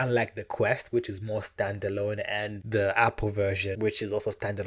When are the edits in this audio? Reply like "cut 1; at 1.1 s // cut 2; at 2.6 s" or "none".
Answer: cut 1; at 2.5 s // cut 2; at 3.8 s